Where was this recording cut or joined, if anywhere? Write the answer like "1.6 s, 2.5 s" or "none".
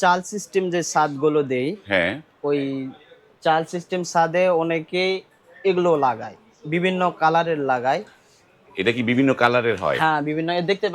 none